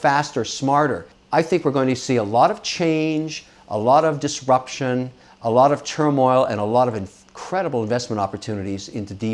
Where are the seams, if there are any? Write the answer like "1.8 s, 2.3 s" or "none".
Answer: 1.1 s